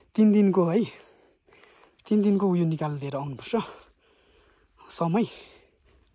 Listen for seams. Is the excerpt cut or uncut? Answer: uncut